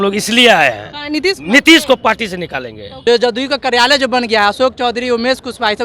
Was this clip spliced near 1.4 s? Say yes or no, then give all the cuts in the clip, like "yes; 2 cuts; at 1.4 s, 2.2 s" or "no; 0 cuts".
no; 1 cut; at 2.9 s